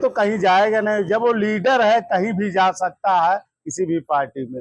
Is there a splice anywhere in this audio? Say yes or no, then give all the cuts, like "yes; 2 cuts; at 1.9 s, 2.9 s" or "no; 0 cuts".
no; 0 cuts